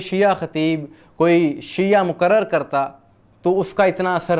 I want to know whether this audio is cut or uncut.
uncut